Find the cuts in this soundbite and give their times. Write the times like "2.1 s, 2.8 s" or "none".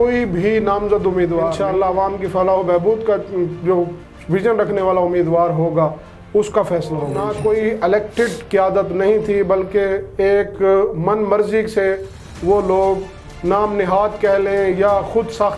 1.6 s, 7.2 s